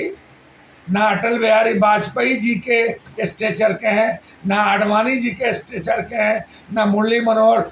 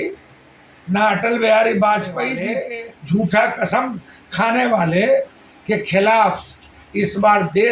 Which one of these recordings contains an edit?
second; 1 cut; at 2.4 s

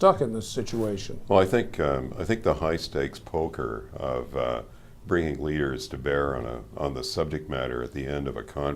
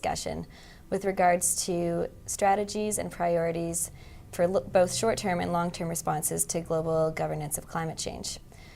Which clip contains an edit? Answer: second; 1 cut; at 5.9 s

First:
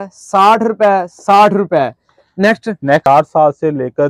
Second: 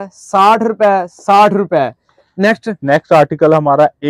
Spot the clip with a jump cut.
first; 1 cut; at 3.1 s

